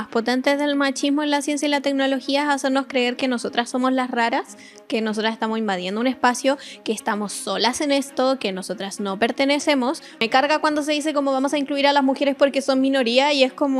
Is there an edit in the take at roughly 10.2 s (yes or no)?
yes